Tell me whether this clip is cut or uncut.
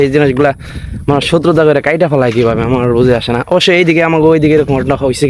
uncut